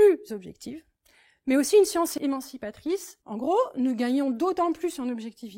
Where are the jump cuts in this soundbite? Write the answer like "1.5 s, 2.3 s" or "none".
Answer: 2.1 s, 3.1 s